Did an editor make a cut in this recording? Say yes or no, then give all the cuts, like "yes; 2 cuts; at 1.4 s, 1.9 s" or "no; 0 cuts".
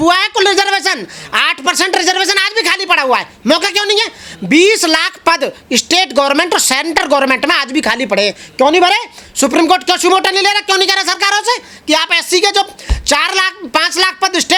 no; 0 cuts